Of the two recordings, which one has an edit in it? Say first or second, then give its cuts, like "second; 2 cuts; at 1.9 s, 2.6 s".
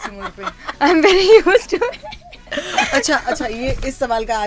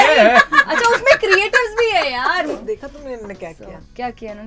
second; 1 cut; at 2.5 s